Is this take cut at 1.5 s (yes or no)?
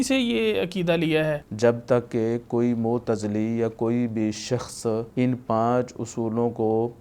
yes